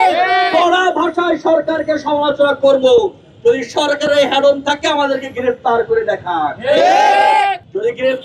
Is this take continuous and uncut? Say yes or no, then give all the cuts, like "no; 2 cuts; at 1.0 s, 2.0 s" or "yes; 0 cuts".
yes; 0 cuts